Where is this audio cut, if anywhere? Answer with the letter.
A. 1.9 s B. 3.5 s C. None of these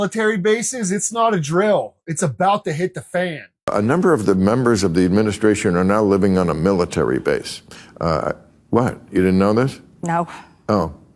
B